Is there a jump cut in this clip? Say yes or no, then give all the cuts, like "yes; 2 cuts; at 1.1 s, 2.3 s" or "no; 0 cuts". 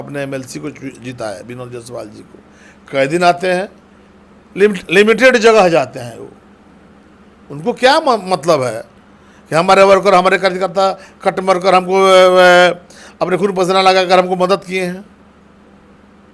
no; 0 cuts